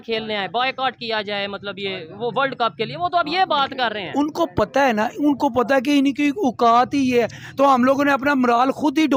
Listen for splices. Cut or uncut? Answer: uncut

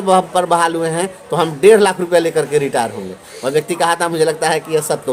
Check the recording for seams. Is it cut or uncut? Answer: uncut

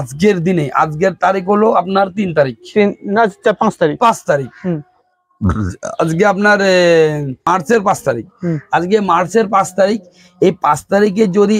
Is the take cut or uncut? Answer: cut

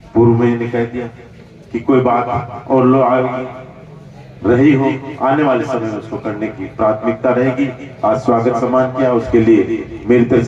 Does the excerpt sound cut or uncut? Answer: uncut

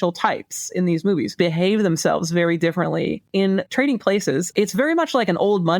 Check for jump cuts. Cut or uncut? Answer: cut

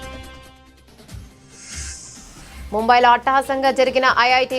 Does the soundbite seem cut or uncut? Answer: uncut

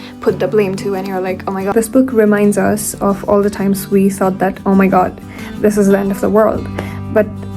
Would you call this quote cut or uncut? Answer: cut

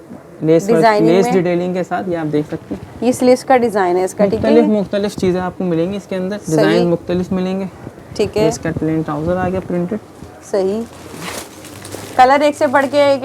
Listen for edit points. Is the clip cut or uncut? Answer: uncut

